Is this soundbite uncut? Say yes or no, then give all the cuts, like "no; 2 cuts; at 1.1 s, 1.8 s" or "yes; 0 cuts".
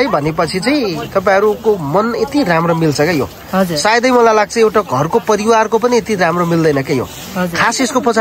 yes; 0 cuts